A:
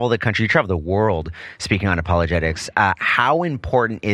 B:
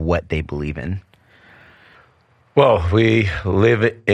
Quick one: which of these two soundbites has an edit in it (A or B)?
B